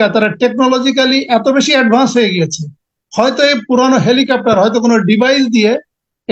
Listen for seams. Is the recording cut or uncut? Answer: uncut